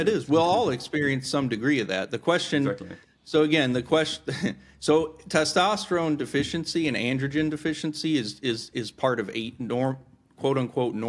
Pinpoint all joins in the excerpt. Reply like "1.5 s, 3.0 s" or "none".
none